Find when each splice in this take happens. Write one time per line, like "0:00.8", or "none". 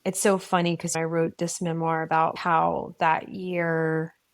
0:00.9
0:02.4